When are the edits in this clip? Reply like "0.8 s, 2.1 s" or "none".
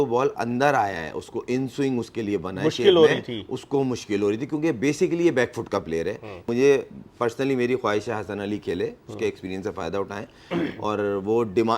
6.4 s